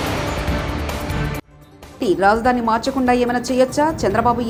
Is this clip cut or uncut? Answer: uncut